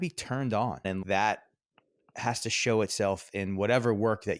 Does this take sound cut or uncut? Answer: cut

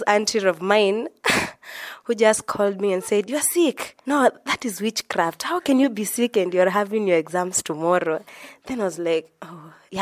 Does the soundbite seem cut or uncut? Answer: uncut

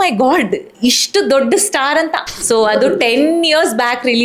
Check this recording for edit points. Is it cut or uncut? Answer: cut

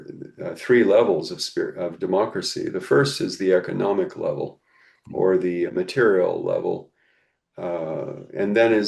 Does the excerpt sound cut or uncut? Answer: uncut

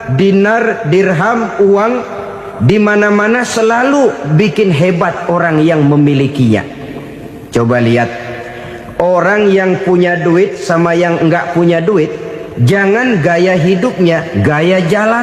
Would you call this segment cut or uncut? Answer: uncut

